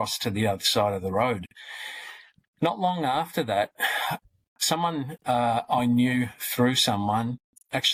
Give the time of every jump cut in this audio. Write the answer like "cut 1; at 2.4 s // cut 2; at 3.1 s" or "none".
none